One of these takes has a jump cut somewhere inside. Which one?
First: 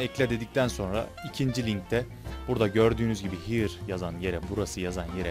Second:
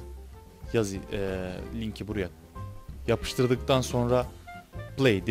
first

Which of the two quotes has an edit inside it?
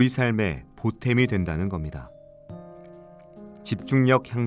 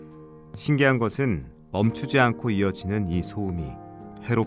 first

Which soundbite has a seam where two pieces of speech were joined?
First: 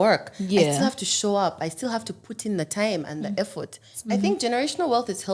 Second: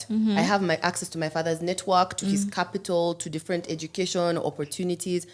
first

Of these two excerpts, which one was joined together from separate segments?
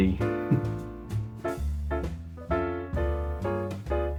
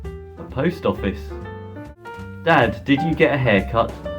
second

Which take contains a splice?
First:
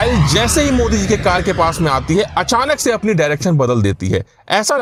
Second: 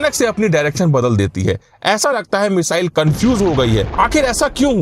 second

